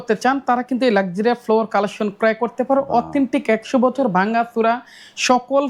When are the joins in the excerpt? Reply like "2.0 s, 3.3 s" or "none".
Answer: none